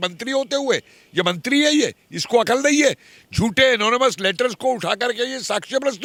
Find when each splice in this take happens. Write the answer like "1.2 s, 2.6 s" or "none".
none